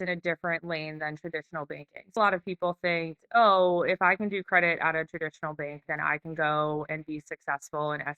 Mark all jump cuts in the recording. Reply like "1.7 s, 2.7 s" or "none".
2.2 s